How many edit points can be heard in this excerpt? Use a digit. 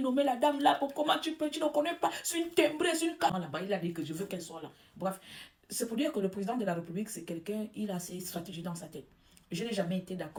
0